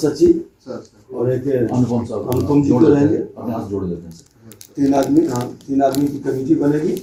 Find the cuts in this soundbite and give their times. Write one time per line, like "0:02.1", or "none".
none